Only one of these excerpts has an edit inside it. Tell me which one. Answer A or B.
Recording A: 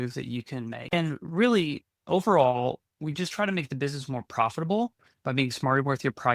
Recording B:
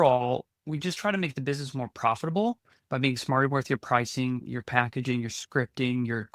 A